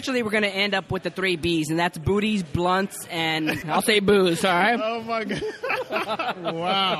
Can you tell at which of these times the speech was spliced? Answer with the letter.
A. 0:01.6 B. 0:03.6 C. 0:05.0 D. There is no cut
B